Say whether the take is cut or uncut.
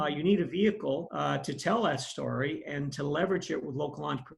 cut